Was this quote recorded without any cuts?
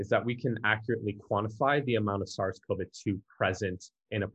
yes; 0 cuts

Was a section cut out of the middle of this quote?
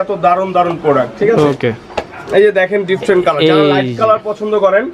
no; 0 cuts

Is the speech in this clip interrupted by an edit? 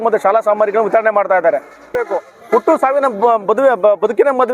yes; 1 cut; at 1.9 s

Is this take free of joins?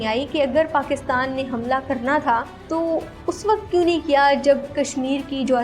no; 1 cut; at 2.6 s

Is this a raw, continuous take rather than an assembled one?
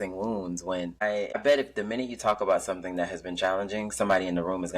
no; 1 cut; at 1.4 s

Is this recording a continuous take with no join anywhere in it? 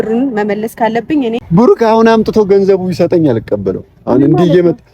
no; 1 cut; at 1.4 s

